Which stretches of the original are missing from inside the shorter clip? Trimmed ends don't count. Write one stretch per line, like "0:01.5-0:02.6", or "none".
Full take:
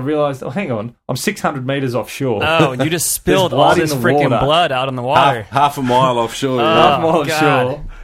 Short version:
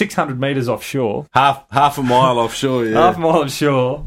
0:02.4-0:05.0